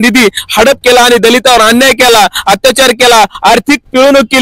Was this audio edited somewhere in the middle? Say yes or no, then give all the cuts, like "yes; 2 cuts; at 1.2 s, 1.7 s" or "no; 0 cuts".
no; 0 cuts